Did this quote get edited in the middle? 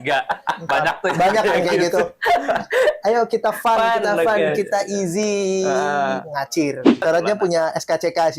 yes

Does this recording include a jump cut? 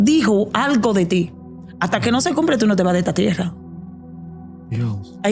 no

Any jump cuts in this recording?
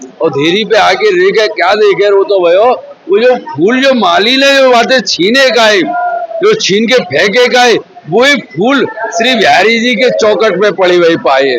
no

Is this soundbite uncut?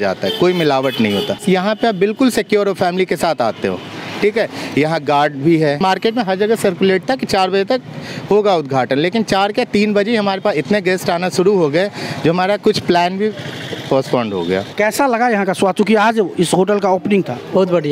no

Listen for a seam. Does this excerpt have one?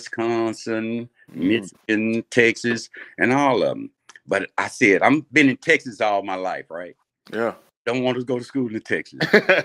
no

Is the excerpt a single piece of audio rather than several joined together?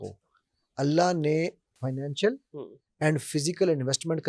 yes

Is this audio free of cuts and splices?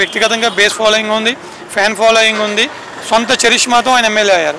yes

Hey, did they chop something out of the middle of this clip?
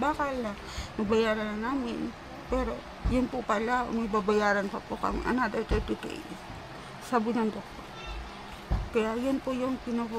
no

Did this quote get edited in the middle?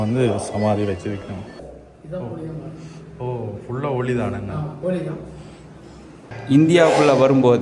yes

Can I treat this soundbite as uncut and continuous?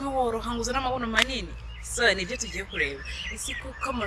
yes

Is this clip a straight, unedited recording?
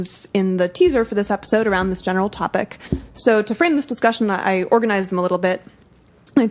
no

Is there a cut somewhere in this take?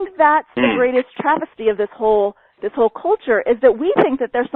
yes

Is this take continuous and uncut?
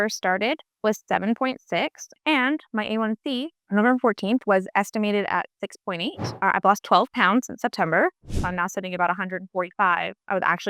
no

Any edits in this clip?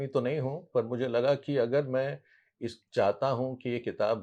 no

